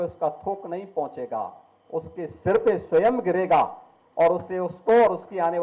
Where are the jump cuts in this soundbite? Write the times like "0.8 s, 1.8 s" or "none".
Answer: none

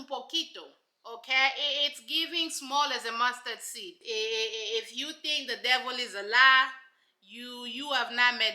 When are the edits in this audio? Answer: 4.0 s

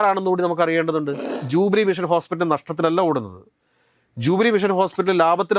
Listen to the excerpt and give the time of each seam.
1.3 s

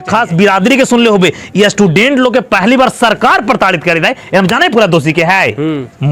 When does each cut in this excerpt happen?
none

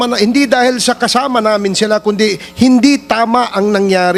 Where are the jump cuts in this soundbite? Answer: none

